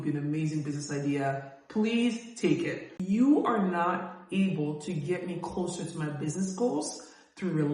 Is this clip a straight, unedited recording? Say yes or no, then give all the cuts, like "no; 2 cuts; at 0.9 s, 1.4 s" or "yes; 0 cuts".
no; 1 cut; at 2.9 s